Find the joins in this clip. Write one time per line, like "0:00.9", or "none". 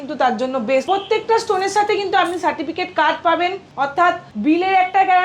0:00.8
0:04.0